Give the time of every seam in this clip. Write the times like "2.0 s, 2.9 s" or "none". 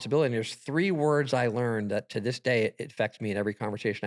none